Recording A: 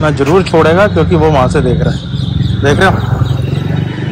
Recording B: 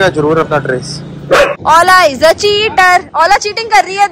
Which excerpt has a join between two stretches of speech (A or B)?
B